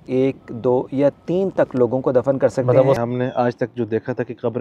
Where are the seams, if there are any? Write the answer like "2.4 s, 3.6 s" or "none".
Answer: 3.0 s

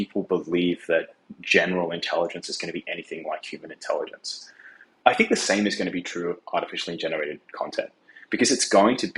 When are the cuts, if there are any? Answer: 4.3 s

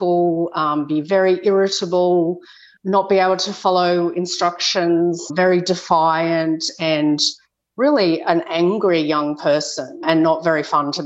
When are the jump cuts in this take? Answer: none

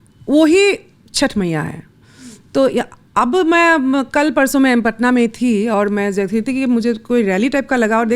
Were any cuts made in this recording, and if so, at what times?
none

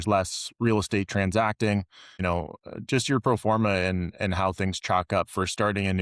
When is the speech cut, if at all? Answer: none

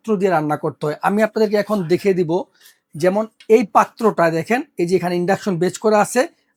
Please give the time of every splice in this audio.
none

